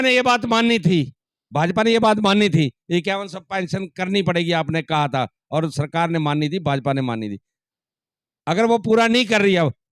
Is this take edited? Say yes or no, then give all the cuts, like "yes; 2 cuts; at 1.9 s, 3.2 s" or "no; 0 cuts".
no; 0 cuts